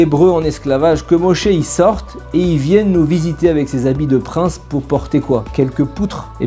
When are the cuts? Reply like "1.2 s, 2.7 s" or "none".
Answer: none